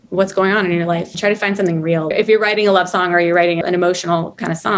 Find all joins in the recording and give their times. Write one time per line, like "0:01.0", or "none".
0:01.1
0:02.1
0:03.6